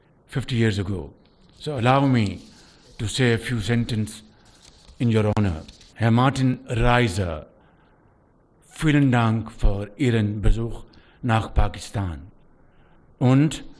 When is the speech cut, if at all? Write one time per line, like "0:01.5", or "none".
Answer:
none